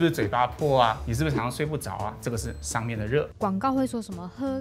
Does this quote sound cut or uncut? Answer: cut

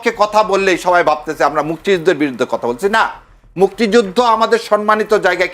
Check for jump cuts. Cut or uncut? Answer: uncut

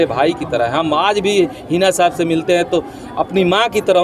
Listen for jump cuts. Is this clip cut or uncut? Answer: uncut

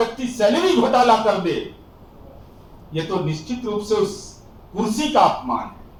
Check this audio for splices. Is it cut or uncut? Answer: uncut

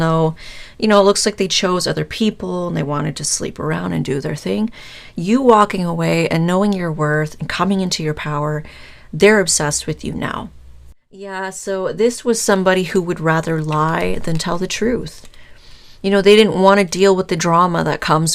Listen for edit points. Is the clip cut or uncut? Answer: cut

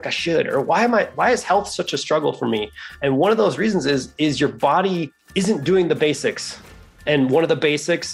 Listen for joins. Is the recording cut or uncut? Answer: cut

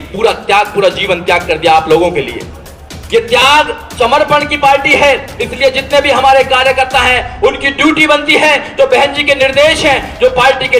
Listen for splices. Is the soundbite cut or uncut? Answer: uncut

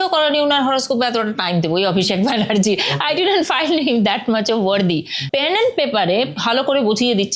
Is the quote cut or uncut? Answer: cut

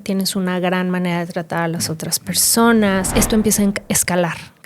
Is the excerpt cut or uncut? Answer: cut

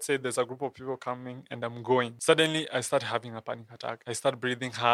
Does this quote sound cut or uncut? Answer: cut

